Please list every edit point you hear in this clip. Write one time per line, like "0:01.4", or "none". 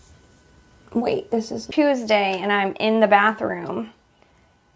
0:01.6